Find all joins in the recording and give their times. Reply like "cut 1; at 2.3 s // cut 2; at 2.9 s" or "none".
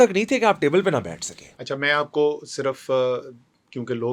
none